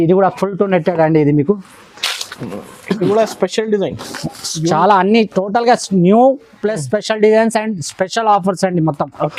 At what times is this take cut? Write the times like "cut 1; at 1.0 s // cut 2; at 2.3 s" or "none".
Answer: none